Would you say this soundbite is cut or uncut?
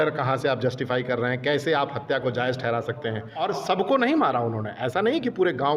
cut